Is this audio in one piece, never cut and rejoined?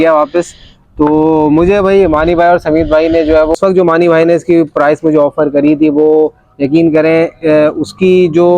no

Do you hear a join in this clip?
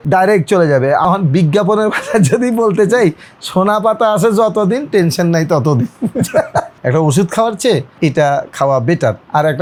no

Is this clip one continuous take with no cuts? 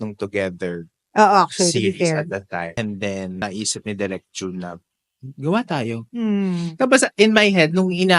no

